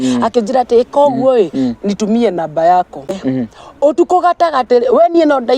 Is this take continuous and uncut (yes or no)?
no